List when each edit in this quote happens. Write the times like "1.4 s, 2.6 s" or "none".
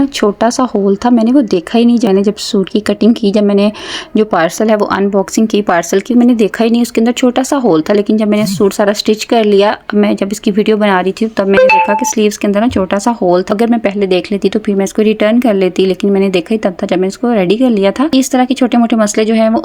2.1 s, 13.4 s, 18.1 s